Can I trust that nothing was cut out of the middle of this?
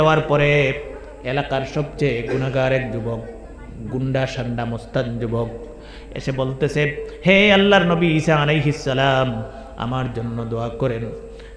yes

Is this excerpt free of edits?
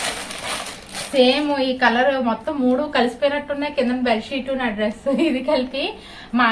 yes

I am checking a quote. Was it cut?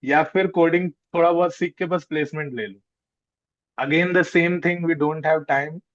no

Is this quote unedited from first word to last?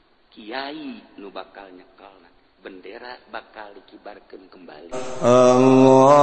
no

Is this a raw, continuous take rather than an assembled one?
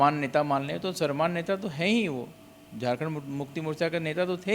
yes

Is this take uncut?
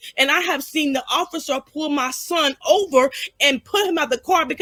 yes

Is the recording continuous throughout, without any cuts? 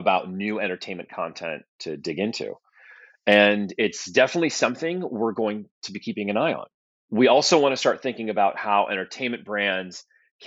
yes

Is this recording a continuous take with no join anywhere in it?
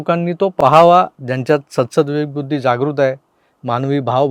yes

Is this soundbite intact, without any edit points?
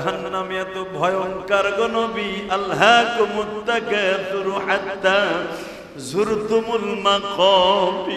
yes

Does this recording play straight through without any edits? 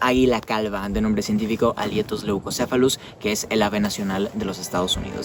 yes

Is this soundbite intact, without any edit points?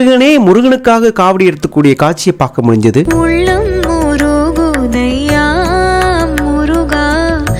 no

